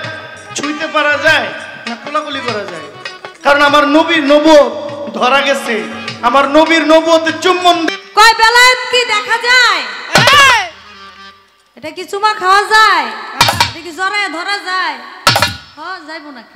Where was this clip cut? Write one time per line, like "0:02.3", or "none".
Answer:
0:07.8